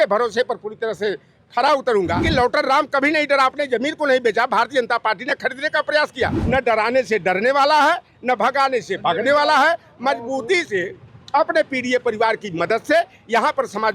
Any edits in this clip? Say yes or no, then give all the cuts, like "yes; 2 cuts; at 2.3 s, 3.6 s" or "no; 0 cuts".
yes; 2 cuts; at 2.2 s, 6.4 s